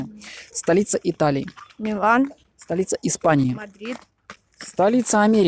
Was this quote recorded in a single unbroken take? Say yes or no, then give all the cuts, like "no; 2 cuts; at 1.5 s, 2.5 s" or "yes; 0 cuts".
yes; 0 cuts